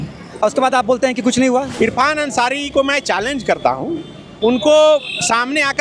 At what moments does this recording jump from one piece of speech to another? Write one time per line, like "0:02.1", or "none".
0:01.7